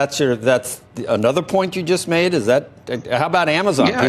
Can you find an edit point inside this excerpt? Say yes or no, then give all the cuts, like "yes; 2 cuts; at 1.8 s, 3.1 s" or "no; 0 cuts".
no; 0 cuts